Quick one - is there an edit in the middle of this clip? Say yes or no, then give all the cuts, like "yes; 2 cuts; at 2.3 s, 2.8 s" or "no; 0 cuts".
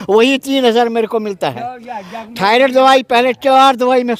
no; 0 cuts